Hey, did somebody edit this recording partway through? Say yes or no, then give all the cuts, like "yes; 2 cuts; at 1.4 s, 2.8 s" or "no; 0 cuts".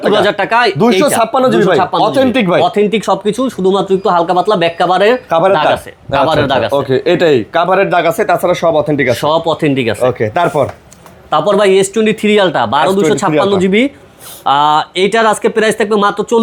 no; 0 cuts